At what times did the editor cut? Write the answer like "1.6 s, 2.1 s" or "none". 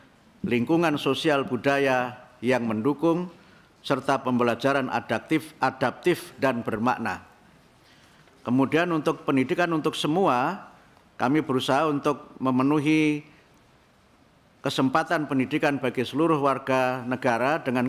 none